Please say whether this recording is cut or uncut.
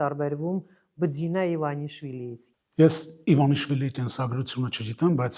cut